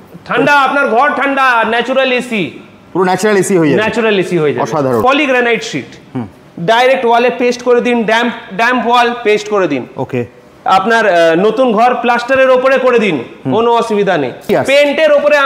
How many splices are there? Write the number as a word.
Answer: two